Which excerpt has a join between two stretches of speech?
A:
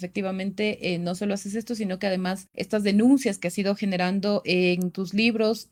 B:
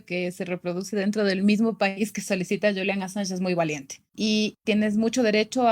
B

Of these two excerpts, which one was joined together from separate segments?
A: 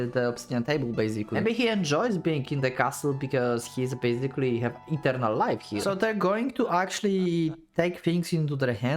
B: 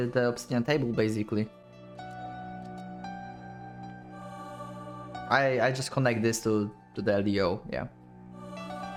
A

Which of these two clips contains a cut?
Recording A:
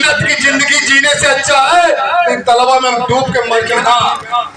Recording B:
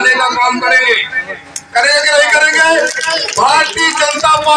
A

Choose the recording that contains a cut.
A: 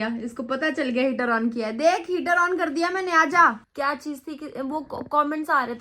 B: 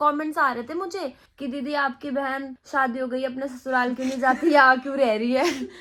A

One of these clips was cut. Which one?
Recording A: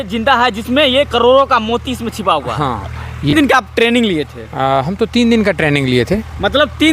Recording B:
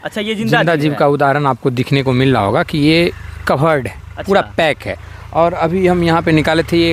A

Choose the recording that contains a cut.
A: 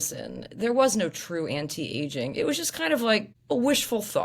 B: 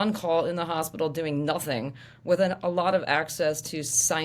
A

